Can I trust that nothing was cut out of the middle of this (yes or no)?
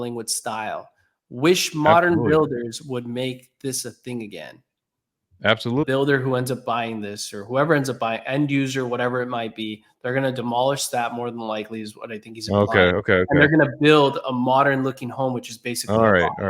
no